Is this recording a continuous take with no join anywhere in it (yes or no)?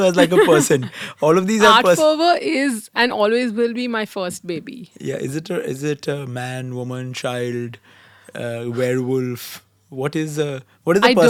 yes